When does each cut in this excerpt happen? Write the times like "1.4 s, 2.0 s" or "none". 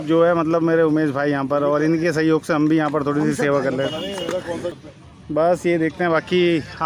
none